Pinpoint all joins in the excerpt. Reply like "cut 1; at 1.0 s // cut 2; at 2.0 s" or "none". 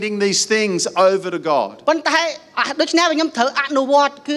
none